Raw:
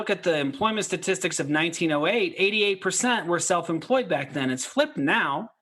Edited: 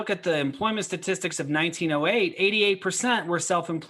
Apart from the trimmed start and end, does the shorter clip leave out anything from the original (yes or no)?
no